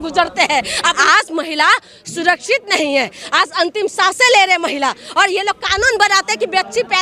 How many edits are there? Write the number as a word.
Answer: one